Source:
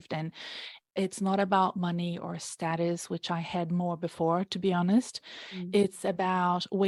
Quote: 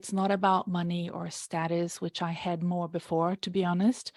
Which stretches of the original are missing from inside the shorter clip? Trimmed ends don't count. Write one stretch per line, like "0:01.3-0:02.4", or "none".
none